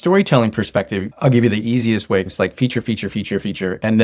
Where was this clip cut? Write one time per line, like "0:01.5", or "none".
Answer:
0:01.0
0:02.3